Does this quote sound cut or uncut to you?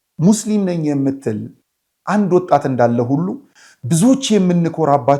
uncut